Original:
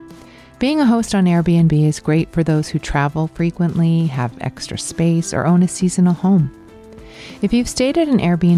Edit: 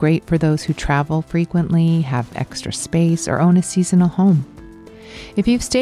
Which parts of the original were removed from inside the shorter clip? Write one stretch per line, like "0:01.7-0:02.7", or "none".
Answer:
none